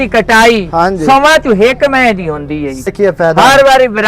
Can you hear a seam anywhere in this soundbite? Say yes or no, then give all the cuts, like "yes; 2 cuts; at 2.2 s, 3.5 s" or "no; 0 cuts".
yes; 1 cut; at 2.9 s